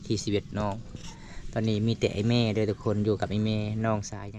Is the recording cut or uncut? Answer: uncut